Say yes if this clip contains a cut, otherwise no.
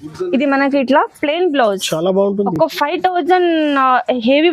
no